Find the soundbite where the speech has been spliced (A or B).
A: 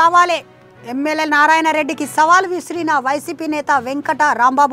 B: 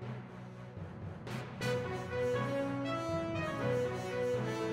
B